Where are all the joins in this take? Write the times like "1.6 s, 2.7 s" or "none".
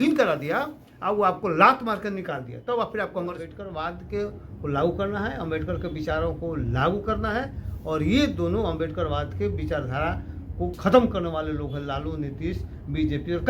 3.6 s